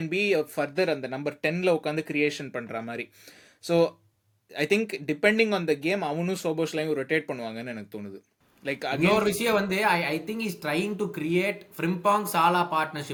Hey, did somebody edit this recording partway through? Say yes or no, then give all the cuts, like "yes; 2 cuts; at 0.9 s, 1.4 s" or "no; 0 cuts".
no; 0 cuts